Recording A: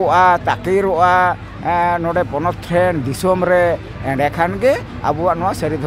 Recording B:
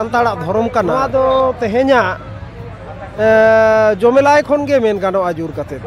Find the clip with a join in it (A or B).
B